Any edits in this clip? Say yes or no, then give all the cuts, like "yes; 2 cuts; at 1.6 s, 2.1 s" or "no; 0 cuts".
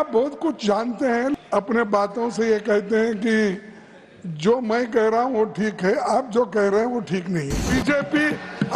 yes; 2 cuts; at 1.3 s, 7.6 s